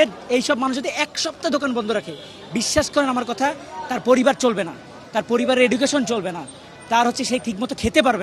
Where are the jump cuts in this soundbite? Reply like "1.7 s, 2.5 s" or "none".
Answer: none